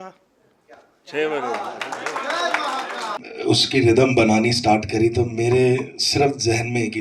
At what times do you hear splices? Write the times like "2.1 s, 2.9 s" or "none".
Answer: 3.2 s